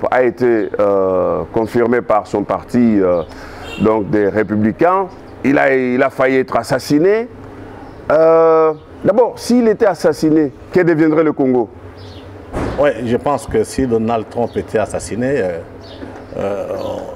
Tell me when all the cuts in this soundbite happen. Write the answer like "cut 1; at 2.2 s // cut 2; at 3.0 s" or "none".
cut 1; at 5.2 s // cut 2; at 10.6 s